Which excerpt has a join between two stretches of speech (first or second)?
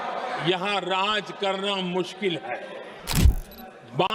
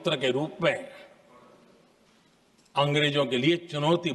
first